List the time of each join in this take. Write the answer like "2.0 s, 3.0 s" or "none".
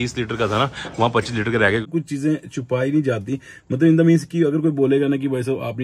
1.9 s